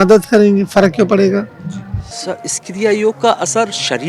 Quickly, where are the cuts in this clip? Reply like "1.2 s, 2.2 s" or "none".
2.3 s